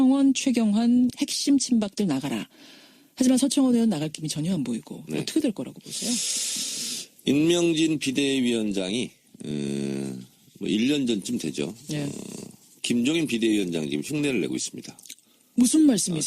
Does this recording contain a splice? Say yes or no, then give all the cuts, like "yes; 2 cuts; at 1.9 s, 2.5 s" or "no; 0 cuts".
yes; 1 cut; at 1.0 s